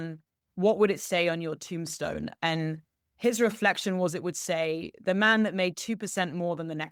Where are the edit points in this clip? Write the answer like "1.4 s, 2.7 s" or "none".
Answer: none

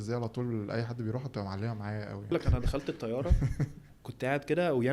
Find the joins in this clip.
2.3 s, 4.0 s

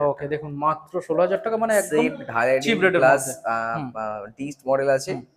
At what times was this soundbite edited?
none

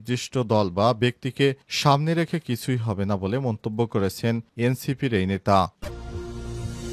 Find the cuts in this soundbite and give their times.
5.9 s

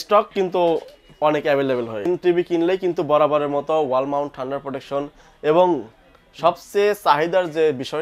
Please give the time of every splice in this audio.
2.1 s

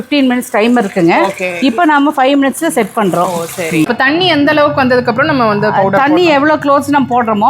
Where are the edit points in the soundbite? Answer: 3.9 s

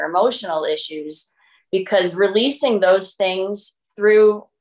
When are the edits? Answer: none

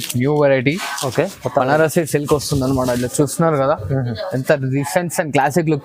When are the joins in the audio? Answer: none

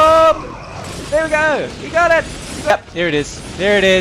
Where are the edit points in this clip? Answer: 2.7 s

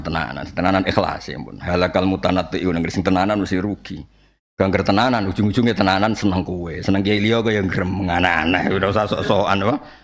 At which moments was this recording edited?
none

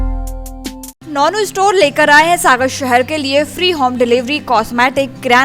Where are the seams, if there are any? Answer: 0.9 s

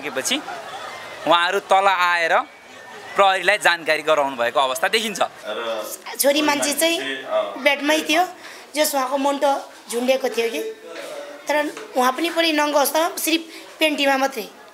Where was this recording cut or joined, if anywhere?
5.5 s

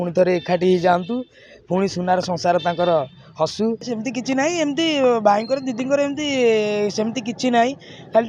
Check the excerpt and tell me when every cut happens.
3.8 s

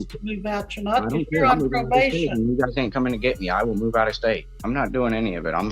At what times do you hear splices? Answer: 4.5 s

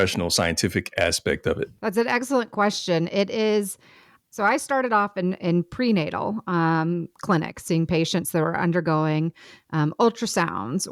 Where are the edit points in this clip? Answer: none

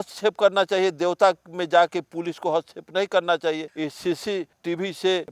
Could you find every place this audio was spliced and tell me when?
none

